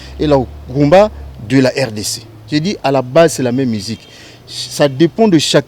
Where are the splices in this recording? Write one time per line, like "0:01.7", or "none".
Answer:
none